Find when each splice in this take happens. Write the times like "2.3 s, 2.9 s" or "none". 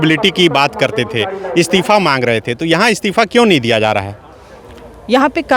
none